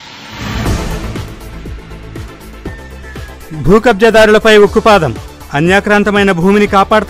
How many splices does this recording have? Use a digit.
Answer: 1